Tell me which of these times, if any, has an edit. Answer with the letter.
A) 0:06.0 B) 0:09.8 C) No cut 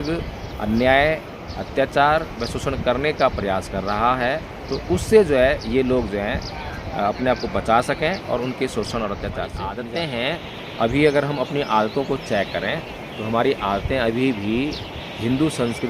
B